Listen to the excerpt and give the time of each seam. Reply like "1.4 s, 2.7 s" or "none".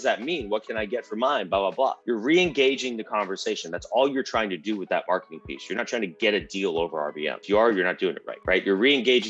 2.0 s, 7.4 s, 8.3 s